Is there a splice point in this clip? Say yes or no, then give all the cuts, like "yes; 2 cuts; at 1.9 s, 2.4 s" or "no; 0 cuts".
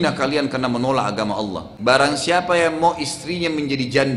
yes; 1 cut; at 1.7 s